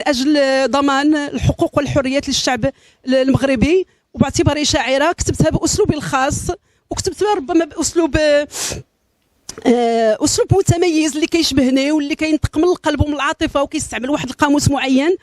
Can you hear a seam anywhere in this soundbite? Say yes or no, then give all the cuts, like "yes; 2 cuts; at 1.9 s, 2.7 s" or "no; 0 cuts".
yes; 1 cut; at 13.9 s